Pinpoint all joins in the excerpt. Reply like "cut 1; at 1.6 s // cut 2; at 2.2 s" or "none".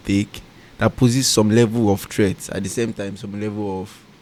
none